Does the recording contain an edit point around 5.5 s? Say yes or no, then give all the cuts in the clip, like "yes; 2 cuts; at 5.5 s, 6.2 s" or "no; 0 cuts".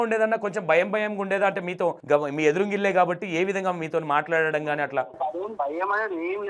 yes; 2 cuts; at 2.0 s, 5.5 s